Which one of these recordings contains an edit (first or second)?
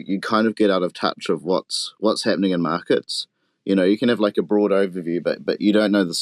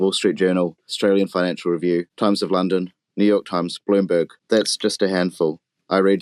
second